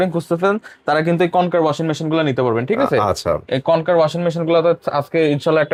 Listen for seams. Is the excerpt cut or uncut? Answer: uncut